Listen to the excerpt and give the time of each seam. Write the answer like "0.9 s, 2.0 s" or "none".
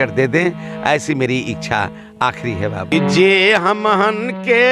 2.9 s